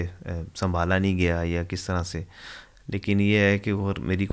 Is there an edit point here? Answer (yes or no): no